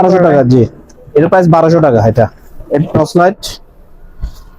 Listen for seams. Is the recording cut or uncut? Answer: cut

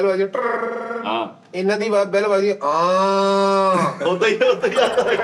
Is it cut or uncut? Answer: uncut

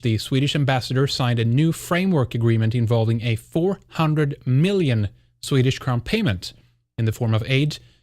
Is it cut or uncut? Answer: cut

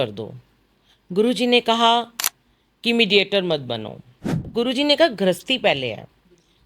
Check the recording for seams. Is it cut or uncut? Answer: cut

